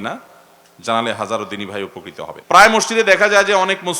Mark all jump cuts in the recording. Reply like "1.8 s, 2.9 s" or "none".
2.3 s